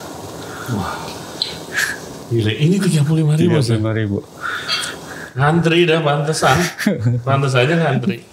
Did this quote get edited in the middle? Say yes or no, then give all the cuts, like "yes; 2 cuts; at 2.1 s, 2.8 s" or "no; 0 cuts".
no; 0 cuts